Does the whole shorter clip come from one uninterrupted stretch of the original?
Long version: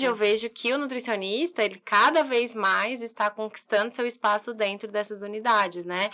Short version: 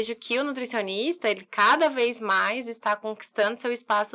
yes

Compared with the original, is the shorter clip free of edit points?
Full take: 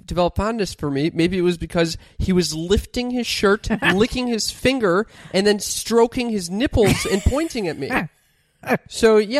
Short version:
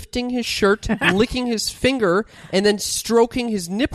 yes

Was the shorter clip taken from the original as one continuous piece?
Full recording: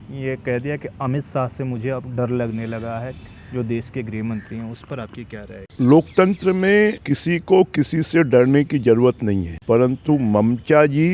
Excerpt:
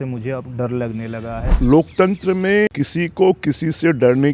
no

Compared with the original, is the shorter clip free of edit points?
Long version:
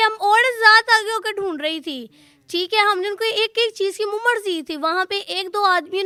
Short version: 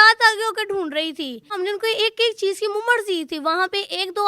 no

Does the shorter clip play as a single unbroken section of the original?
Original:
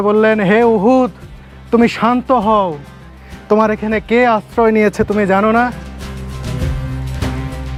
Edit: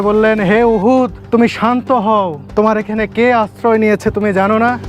no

